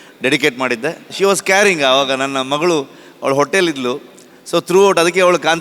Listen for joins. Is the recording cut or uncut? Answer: cut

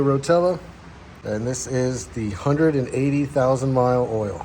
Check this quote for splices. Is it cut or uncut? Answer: cut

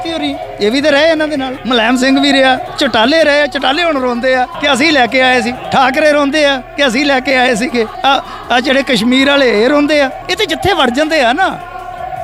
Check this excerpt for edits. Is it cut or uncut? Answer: cut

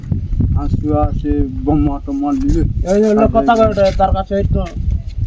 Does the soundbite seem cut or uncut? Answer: uncut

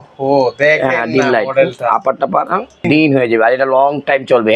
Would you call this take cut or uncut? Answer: cut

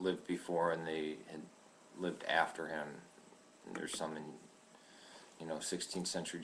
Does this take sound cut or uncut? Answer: uncut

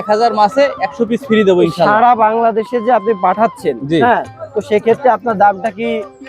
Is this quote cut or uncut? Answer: uncut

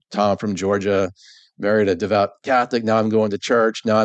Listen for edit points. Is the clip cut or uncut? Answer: uncut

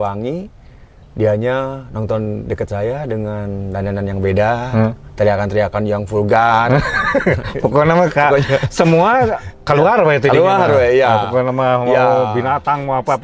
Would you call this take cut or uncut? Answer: uncut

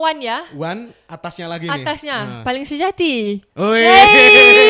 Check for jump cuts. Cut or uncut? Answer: uncut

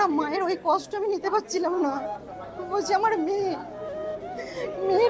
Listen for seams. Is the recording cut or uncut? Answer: uncut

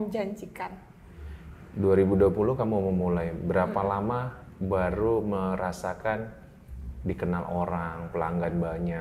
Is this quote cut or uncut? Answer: uncut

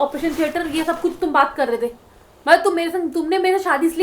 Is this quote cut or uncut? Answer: uncut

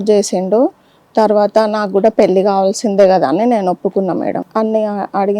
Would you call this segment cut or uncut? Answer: cut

